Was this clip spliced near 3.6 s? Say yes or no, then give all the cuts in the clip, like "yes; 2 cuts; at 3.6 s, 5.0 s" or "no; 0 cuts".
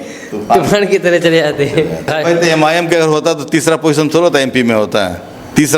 no; 1 cut; at 2.1 s